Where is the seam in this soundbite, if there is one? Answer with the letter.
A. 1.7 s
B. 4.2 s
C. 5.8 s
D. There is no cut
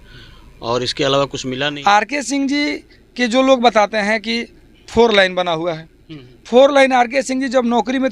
A